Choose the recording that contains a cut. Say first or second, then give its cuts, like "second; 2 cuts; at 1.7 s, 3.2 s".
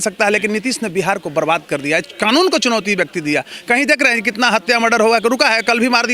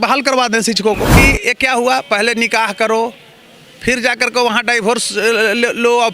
second; 1 cut; at 1.2 s